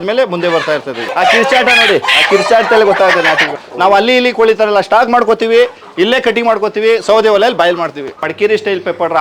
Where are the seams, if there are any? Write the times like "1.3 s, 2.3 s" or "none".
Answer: 1.1 s, 3.5 s, 8.2 s